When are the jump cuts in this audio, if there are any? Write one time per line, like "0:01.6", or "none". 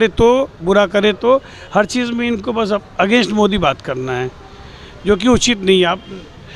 none